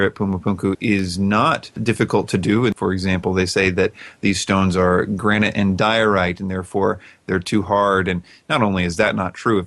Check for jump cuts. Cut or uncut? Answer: cut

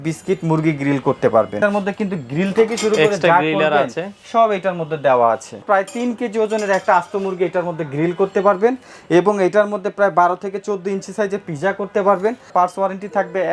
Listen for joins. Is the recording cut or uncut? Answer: cut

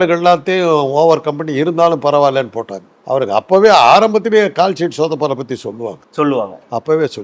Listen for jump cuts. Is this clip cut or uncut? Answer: uncut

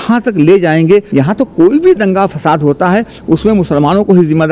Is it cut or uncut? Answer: cut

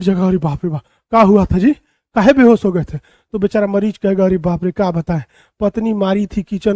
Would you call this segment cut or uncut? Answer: uncut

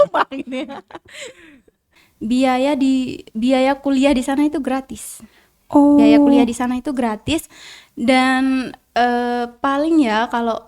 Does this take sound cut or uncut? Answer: cut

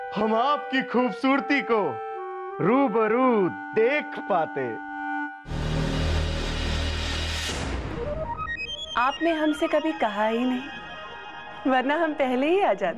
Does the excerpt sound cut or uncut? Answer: uncut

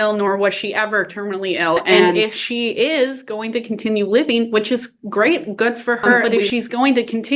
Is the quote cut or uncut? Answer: cut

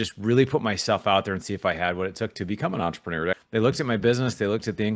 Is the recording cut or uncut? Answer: cut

